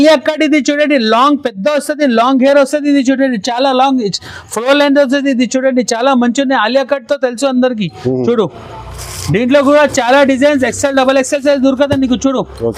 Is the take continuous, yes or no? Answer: yes